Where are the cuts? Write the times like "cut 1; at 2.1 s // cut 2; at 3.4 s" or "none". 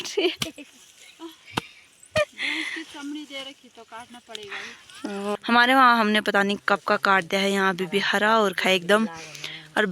cut 1; at 5.4 s